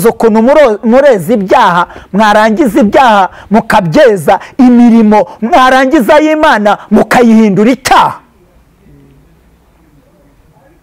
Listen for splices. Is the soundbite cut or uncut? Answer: uncut